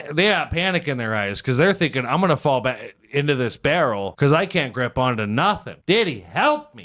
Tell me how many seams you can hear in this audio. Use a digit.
2